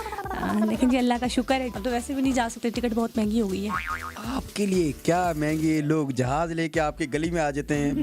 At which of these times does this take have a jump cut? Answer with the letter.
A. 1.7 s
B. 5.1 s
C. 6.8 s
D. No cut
A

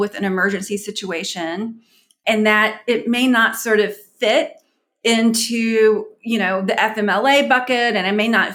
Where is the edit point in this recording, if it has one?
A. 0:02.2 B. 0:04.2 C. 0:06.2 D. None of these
A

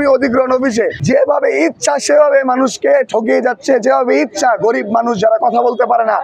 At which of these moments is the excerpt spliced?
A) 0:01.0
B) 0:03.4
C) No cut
A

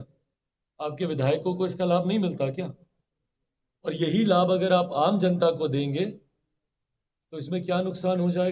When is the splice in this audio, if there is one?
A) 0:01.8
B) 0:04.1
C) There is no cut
C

